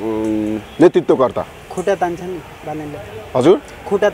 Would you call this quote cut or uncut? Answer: uncut